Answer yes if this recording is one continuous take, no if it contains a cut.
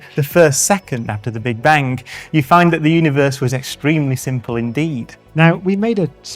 no